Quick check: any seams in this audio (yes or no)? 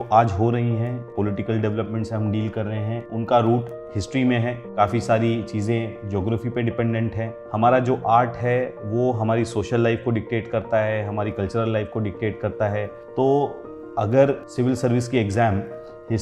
yes